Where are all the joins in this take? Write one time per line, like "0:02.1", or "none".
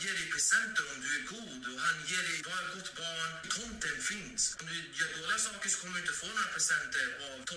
0:03.4
0:04.6